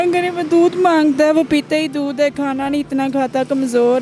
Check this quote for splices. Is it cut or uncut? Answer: uncut